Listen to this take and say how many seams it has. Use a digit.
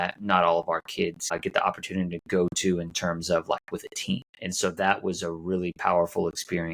2